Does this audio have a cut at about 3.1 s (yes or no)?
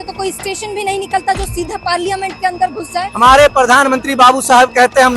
yes